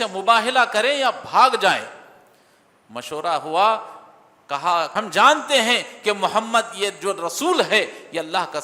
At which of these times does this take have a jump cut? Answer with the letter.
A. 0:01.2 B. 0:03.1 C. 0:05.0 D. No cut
C